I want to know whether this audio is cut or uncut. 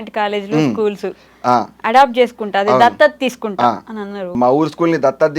cut